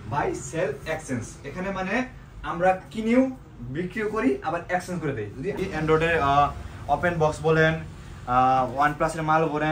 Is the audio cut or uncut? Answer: cut